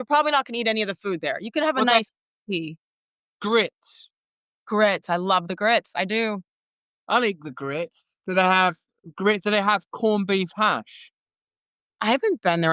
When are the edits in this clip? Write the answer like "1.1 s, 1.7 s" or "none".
none